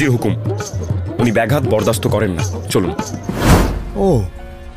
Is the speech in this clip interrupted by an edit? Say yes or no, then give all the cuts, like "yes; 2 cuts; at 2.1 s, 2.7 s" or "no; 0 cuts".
yes; 1 cut; at 3.5 s